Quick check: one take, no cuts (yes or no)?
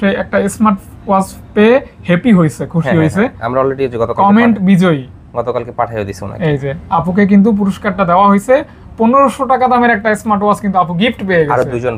yes